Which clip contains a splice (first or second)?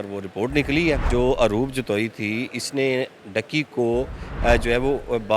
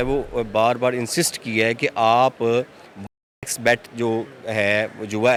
first